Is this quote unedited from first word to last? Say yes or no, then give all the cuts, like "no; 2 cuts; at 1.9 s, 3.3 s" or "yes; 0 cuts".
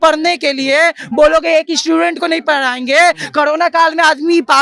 yes; 0 cuts